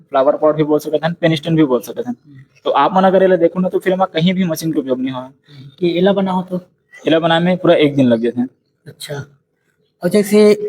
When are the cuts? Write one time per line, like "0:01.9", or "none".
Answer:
0:05.7